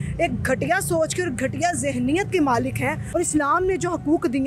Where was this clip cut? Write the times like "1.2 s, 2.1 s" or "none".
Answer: 3.0 s